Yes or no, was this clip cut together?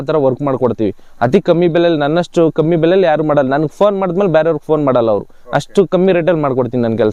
no